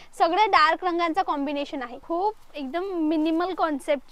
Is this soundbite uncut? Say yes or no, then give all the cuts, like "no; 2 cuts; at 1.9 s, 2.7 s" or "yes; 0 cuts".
no; 1 cut; at 1.9 s